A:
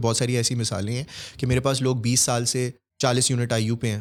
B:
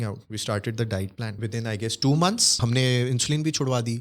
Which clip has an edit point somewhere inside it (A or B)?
B